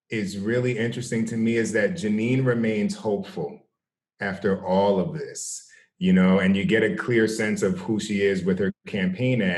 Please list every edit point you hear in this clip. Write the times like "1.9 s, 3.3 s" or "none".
none